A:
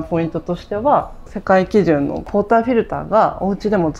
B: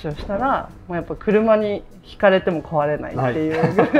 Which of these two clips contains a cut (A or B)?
A